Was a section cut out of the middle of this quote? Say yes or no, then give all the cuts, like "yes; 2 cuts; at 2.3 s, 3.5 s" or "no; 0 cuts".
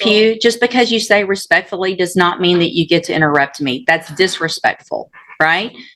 no; 0 cuts